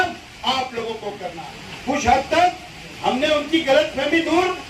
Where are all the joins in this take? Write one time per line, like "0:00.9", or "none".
0:01.3